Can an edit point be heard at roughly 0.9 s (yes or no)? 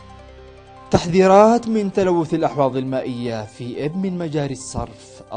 yes